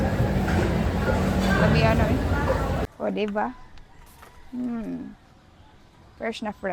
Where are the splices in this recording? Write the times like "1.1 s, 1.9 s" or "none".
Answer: 2.8 s